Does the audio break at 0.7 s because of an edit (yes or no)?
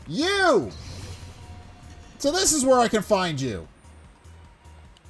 yes